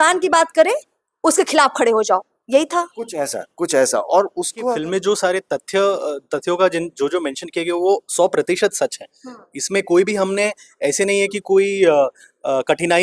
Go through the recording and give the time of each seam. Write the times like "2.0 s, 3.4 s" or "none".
4.7 s